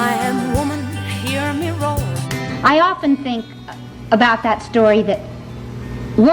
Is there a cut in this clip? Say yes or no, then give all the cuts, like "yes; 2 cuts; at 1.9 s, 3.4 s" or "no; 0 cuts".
no; 0 cuts